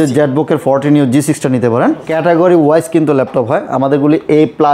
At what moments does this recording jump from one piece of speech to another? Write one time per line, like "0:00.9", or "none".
0:02.1